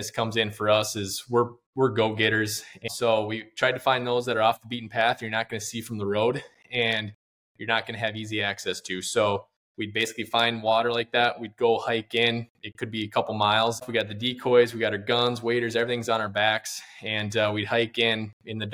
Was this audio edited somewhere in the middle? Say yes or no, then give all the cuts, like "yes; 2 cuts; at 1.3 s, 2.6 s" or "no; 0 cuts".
yes; 2 cuts; at 2.9 s, 13.9 s